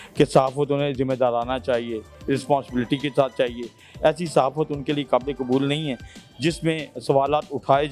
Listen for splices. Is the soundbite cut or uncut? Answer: uncut